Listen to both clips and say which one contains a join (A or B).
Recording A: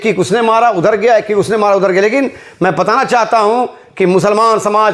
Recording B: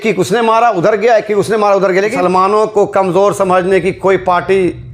B